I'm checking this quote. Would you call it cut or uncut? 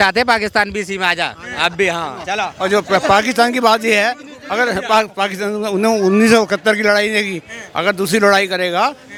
uncut